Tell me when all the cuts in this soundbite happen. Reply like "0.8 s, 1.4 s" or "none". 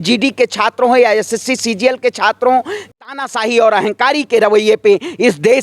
2.9 s